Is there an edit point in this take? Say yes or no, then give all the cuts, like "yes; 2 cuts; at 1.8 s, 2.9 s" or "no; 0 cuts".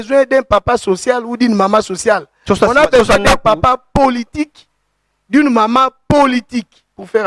no; 0 cuts